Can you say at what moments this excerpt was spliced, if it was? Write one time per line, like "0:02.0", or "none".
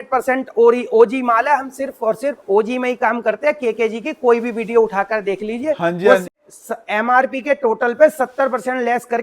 0:06.3